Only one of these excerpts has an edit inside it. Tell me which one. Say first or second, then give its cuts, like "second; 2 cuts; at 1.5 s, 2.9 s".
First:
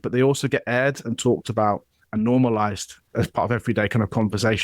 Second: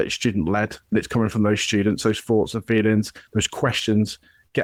first; 1 cut; at 2.9 s